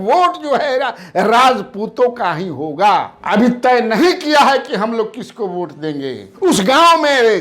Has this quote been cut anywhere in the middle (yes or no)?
yes